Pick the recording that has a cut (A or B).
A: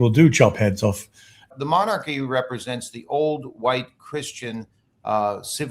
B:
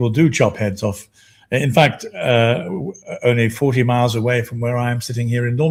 A